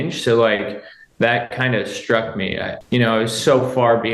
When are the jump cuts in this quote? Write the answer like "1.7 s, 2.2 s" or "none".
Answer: 2.7 s